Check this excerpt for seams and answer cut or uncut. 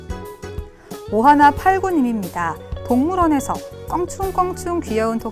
cut